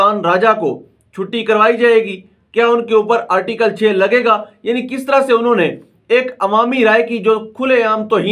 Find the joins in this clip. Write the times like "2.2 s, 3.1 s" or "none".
none